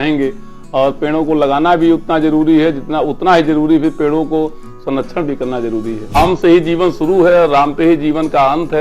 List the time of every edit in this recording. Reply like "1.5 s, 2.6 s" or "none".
6.1 s